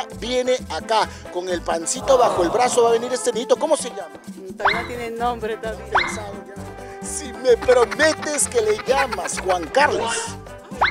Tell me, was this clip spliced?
no; 0 cuts

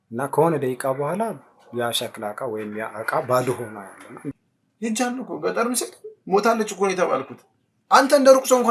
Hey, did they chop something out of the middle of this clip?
yes; 1 cut; at 4.3 s

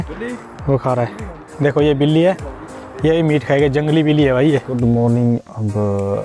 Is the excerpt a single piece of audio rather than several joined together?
no; 2 cuts; at 1.4 s, 4.7 s

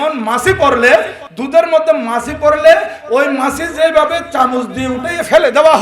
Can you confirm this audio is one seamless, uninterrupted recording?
yes; 0 cuts

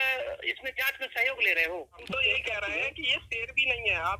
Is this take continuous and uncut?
no; 1 cut; at 2.0 s

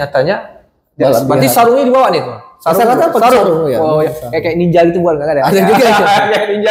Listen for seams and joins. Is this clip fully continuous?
yes; 0 cuts

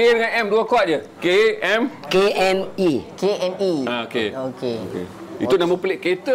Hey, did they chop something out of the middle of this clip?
no; 0 cuts

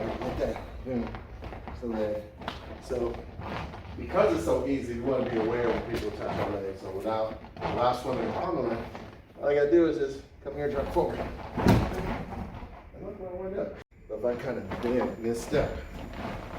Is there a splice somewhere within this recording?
yes; 1 cut; at 13.9 s

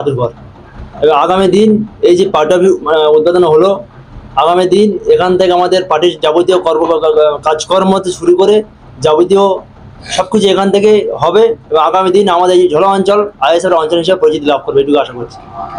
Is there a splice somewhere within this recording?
no; 0 cuts

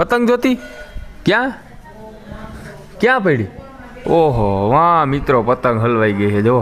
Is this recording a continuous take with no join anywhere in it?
yes; 0 cuts

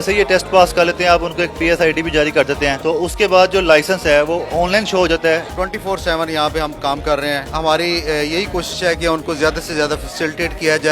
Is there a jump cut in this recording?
yes; 3 cuts; at 2.8 s, 5.5 s, 7.5 s

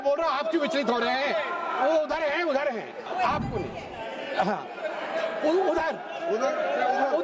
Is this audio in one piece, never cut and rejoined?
no; 1 cut; at 3.0 s

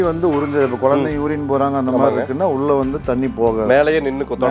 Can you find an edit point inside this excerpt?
no; 0 cuts

